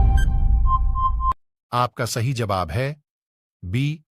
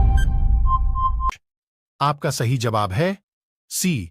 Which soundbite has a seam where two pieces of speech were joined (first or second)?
first